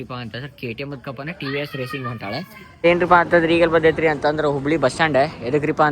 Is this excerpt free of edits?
no; 1 cut; at 2.8 s

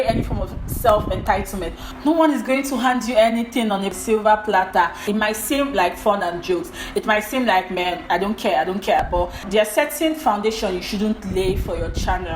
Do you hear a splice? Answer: yes; 2 cuts; at 5.0 s, 9.0 s

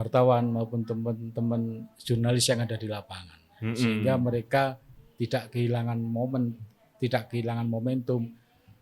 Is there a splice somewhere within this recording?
no; 0 cuts

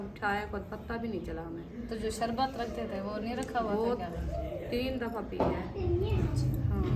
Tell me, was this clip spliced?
no; 0 cuts

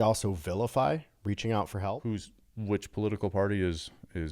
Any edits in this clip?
yes; 1 cut; at 2.0 s

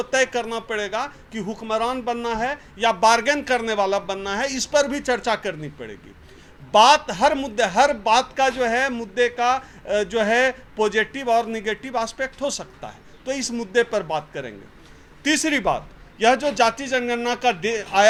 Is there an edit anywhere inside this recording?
no; 0 cuts

